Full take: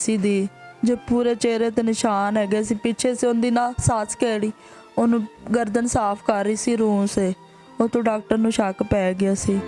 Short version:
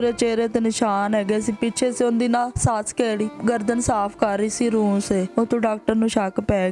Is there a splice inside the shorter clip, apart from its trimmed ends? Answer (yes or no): yes